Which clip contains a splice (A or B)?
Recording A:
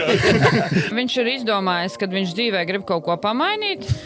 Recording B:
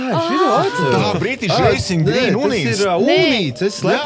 A